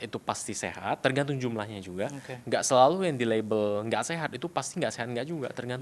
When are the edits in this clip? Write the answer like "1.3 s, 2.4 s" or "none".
1.0 s